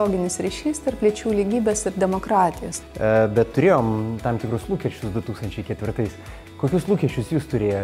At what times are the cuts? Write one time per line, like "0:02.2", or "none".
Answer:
0:02.7

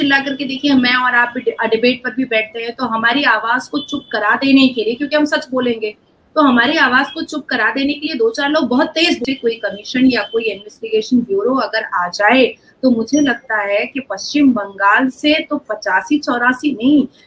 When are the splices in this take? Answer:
0:09.2

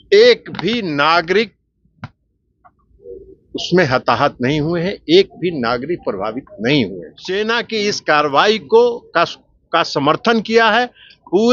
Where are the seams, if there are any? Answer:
0:07.4

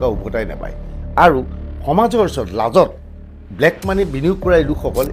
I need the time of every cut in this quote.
none

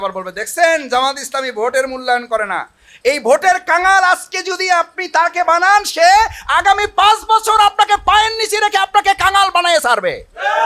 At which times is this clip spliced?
none

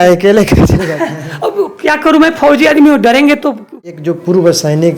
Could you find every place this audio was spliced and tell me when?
0:03.8

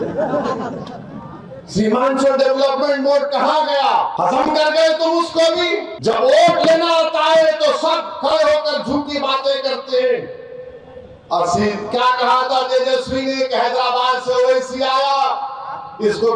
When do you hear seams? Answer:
0:04.1
0:05.9

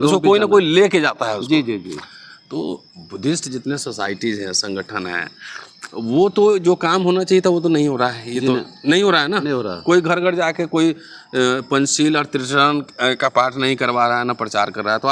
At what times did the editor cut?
none

